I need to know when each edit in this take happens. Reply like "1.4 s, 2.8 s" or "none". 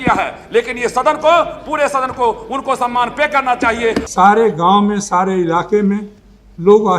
4.0 s